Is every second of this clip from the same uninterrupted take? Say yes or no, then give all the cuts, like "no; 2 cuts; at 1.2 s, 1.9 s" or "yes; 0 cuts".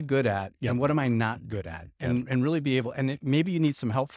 yes; 0 cuts